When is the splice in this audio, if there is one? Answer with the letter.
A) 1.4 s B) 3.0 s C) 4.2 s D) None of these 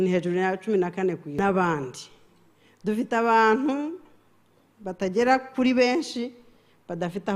A